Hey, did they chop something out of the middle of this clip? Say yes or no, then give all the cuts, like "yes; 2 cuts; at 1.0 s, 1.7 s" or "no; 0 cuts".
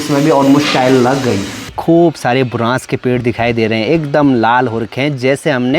yes; 1 cut; at 1.7 s